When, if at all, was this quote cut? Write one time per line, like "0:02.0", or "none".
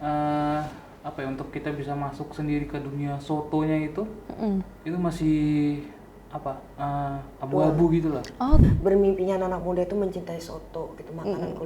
0:08.7